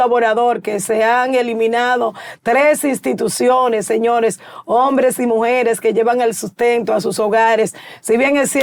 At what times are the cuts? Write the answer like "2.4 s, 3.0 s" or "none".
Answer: none